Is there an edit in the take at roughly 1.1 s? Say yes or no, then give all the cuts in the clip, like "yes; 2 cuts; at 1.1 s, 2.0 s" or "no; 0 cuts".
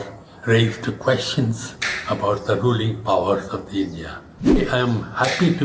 no; 1 cut; at 4.6 s